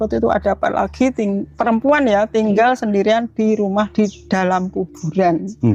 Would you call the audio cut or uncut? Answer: uncut